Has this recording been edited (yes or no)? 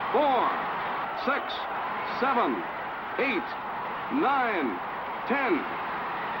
no